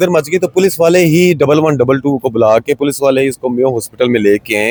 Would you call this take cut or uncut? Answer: uncut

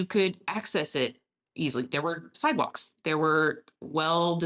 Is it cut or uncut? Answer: uncut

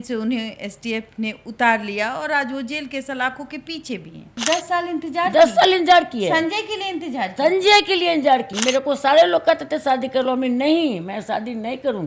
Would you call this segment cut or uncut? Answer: cut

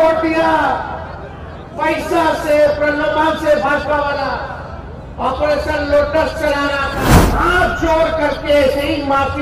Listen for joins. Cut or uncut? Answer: cut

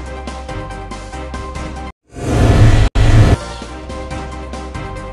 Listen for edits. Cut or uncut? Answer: cut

